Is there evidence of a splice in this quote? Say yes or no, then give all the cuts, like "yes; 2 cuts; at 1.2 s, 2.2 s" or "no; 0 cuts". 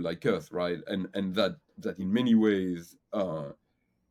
no; 0 cuts